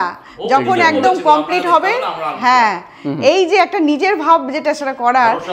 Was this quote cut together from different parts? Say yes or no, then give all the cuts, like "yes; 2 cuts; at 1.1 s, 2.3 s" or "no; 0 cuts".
no; 0 cuts